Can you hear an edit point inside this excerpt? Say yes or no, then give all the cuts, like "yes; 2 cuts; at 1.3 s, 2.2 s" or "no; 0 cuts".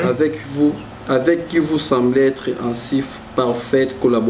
no; 0 cuts